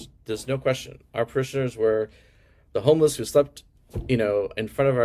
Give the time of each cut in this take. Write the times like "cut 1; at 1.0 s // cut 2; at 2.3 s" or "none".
none